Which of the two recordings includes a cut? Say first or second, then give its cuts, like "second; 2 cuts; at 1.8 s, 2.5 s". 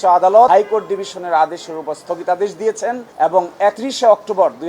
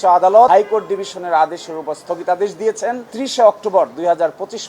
second; 1 cut; at 3.1 s